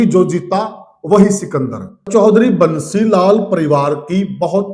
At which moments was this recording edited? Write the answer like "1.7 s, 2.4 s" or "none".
2.1 s